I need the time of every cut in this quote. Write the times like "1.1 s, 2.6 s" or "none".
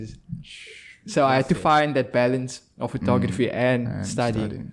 none